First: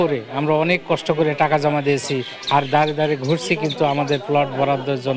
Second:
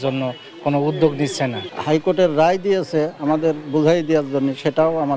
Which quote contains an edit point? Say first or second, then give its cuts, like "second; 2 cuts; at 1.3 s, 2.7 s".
second; 1 cut; at 1.7 s